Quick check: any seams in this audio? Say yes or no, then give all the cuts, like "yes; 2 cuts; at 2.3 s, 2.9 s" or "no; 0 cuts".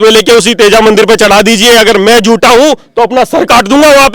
no; 0 cuts